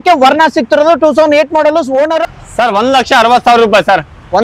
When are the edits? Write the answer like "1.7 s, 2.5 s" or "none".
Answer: 2.2 s